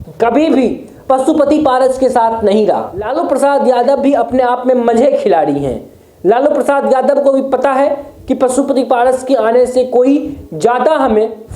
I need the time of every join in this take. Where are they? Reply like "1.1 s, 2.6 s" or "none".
3.1 s